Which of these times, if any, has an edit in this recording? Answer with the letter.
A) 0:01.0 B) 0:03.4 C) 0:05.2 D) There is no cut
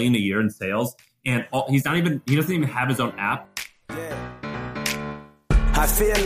B